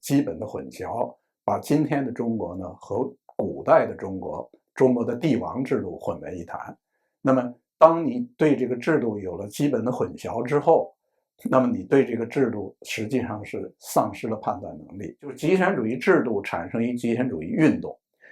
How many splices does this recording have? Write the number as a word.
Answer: one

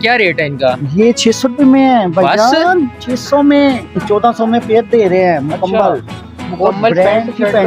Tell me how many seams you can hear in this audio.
one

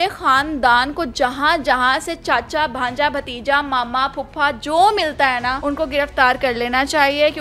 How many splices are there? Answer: one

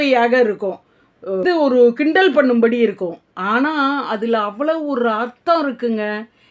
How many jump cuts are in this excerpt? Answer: one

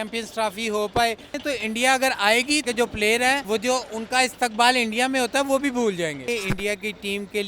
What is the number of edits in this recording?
four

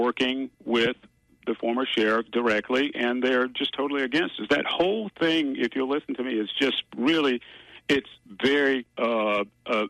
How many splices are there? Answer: one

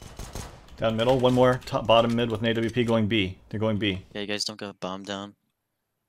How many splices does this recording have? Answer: one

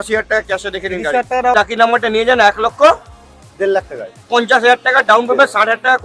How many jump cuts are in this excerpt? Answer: one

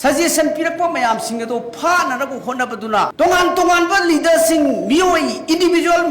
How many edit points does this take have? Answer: one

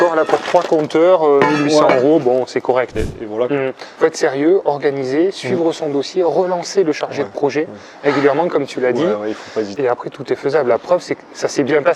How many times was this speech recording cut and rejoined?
two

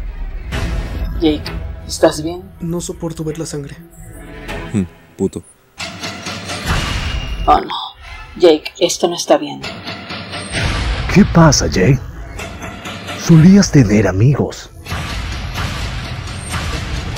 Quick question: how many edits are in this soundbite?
zero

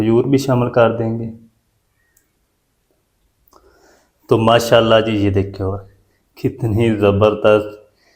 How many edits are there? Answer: one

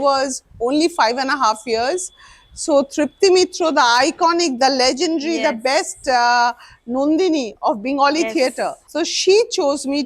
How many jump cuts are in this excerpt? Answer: one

